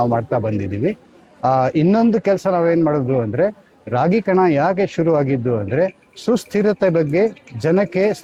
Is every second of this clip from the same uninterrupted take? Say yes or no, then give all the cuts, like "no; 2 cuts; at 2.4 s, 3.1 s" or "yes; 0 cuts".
yes; 0 cuts